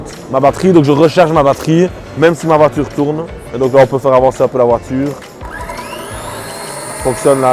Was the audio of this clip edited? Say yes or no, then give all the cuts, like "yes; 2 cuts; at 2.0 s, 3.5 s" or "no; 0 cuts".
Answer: no; 0 cuts